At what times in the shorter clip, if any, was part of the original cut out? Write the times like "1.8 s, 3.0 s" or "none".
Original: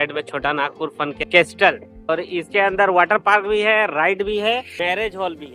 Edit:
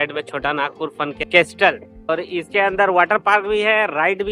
none